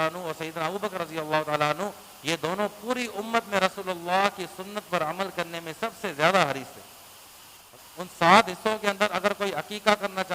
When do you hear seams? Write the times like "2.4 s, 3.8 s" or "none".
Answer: 7.6 s